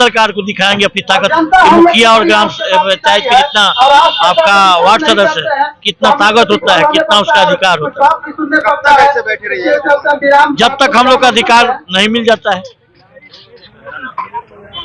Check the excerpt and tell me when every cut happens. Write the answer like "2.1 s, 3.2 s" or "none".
none

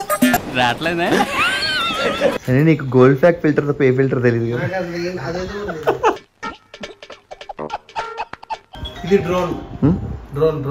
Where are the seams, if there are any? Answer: 2.4 s, 8.6 s

